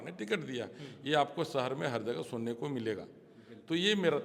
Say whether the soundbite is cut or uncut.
uncut